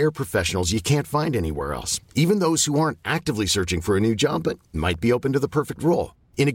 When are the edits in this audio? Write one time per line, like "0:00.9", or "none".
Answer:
none